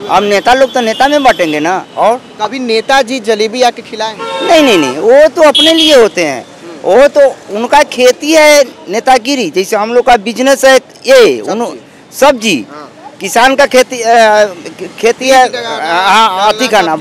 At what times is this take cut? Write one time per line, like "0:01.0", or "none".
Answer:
0:01.9